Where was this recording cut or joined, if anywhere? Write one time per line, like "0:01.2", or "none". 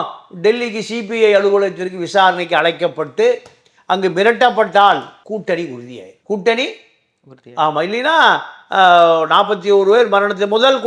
none